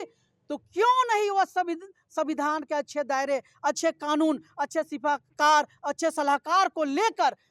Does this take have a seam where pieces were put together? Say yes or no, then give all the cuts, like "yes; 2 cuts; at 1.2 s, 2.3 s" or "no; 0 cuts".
no; 0 cuts